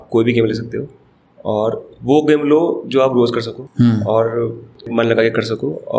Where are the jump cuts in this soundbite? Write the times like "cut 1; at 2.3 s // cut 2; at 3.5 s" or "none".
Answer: cut 1; at 3.6 s // cut 2; at 4.9 s